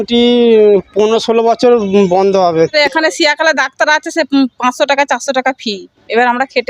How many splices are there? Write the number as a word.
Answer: one